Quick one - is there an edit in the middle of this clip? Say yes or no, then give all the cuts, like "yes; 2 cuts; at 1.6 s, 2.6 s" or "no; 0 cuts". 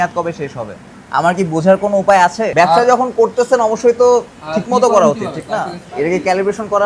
yes; 1 cut; at 5.8 s